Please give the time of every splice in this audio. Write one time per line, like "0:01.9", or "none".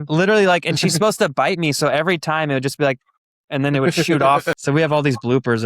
0:04.6